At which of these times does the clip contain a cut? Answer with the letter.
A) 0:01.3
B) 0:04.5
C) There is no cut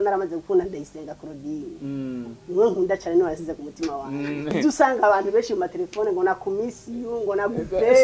B